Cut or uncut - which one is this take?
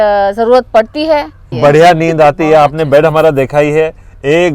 cut